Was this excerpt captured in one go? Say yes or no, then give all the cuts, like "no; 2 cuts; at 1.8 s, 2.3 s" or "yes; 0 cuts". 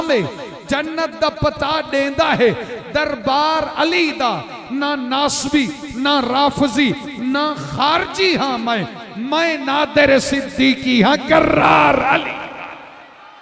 yes; 0 cuts